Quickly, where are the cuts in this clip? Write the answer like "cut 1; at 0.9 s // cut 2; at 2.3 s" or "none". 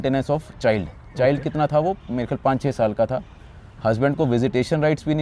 none